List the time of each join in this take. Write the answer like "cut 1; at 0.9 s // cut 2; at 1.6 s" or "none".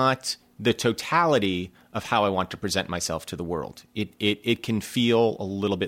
none